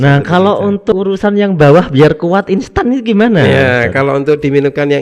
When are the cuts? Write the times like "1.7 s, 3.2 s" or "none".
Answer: 0.9 s